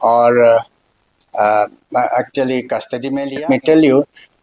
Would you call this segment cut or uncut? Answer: cut